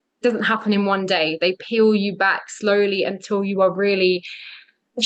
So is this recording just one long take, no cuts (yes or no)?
yes